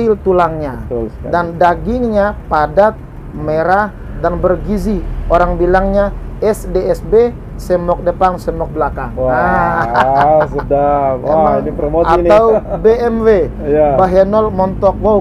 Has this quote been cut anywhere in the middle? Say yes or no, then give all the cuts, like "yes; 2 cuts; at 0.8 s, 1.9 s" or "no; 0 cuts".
no; 0 cuts